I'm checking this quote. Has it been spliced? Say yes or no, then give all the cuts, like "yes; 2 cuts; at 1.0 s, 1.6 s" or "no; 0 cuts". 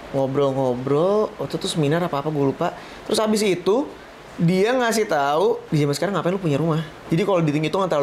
yes; 2 cuts; at 5.6 s, 6.9 s